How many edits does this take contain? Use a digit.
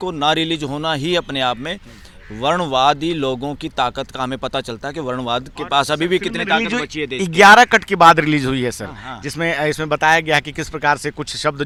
0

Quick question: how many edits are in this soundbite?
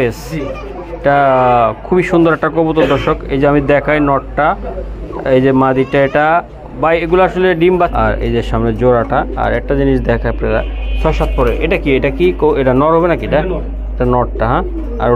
1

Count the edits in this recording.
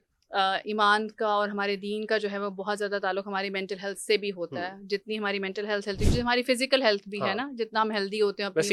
0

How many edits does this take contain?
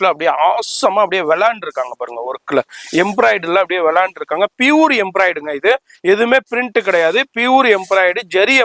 0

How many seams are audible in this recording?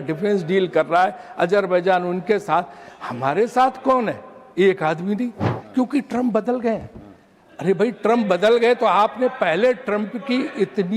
1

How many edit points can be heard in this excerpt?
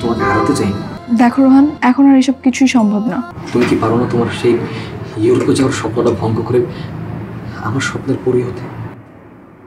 3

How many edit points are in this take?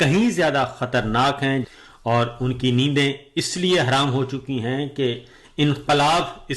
1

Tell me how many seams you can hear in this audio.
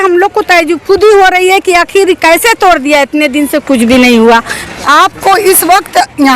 1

